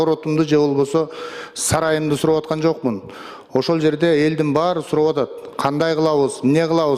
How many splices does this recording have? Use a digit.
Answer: 0